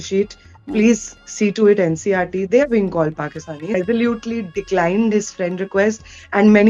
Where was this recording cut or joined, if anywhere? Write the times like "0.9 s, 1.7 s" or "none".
3.5 s